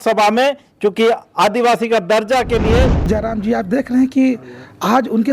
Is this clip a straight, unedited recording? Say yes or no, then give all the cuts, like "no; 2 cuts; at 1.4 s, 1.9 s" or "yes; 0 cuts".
no; 1 cut; at 3.1 s